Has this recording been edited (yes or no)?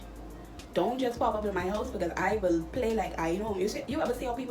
no